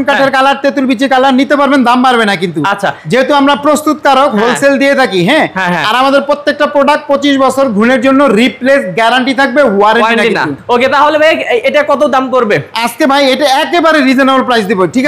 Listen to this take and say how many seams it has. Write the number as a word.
zero